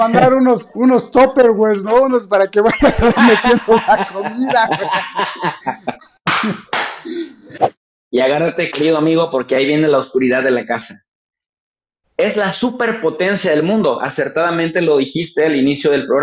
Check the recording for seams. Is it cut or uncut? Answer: cut